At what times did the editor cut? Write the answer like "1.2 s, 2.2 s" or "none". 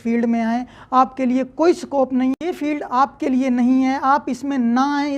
2.4 s